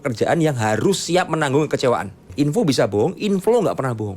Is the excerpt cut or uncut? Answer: cut